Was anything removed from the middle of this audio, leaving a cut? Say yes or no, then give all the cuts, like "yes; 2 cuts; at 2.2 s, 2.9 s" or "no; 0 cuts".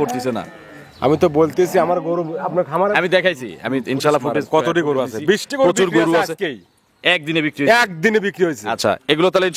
no; 0 cuts